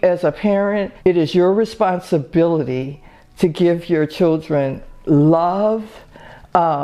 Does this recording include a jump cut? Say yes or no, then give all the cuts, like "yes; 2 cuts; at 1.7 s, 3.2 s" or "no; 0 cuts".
yes; 1 cut; at 0.9 s